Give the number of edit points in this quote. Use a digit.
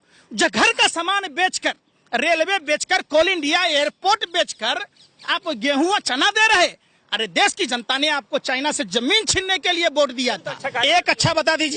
1